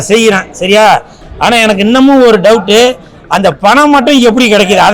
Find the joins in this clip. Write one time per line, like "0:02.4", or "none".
0:01.2